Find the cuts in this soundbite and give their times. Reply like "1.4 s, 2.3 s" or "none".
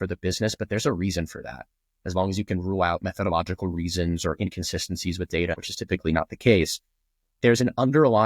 5.6 s

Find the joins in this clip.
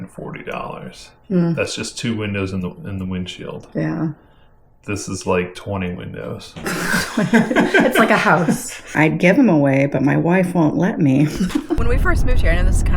8.9 s, 11.8 s

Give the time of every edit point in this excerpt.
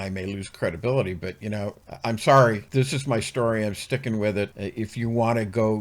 1.8 s, 2.6 s, 4.6 s

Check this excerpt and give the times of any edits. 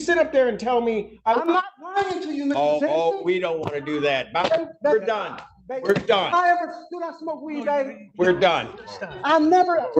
1.0 s

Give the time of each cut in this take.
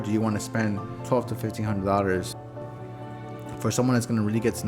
0.9 s, 2.5 s

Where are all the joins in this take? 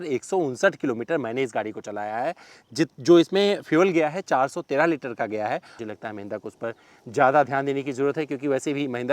5.8 s

